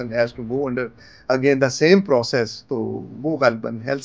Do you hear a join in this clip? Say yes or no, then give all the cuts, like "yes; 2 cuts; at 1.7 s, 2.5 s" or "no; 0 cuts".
no; 0 cuts